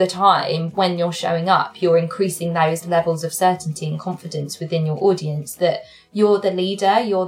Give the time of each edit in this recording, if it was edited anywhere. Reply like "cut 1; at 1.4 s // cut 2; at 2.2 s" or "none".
none